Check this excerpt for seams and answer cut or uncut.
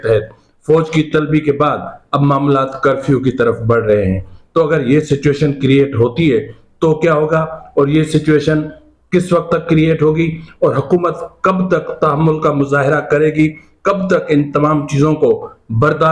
uncut